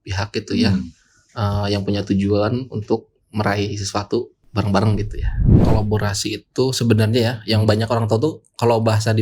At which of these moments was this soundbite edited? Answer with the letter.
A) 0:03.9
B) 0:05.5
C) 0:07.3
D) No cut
B